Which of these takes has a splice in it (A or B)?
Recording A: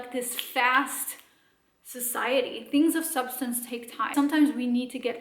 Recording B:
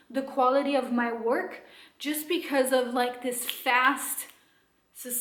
A